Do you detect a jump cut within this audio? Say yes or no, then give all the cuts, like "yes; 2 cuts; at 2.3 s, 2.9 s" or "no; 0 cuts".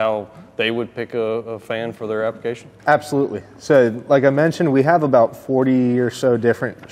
no; 0 cuts